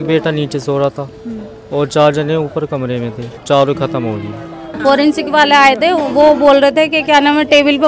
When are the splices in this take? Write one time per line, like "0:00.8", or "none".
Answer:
0:04.6

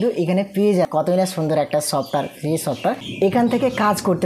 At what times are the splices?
0:00.9
0:03.1

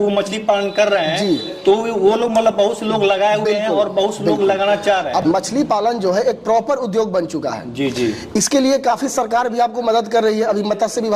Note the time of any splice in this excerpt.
0:05.2

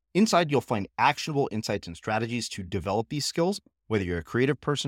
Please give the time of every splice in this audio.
none

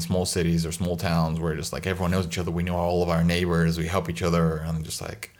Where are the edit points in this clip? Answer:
none

